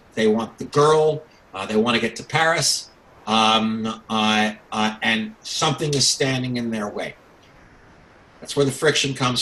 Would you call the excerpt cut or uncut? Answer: uncut